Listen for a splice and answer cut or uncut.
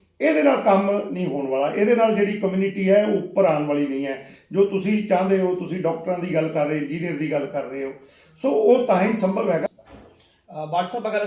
cut